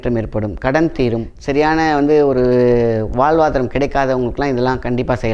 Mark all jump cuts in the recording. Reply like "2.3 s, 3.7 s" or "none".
1.3 s